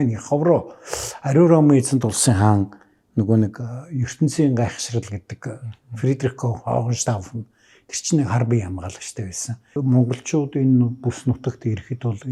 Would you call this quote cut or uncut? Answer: cut